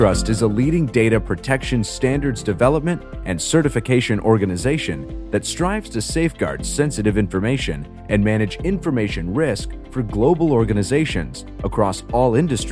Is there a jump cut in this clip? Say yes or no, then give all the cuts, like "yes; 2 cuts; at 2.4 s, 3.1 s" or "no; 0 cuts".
no; 0 cuts